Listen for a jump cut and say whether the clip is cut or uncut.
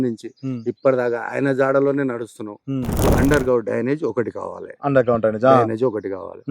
cut